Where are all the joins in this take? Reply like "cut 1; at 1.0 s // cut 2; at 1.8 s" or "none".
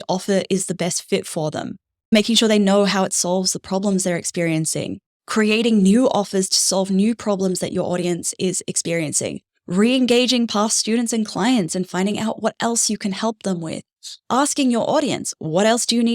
cut 1; at 2.1 s